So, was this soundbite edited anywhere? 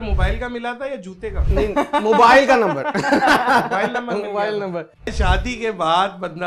yes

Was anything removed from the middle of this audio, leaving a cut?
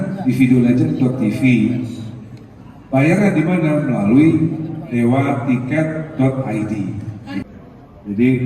yes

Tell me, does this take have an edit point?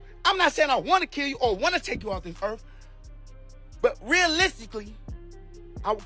no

